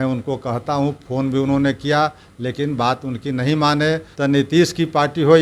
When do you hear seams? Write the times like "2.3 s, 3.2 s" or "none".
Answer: 4.1 s